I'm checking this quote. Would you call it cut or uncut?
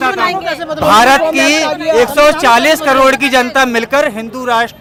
uncut